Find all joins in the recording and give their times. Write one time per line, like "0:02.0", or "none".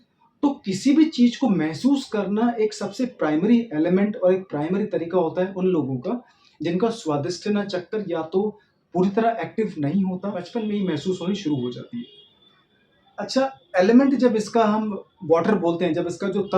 0:10.5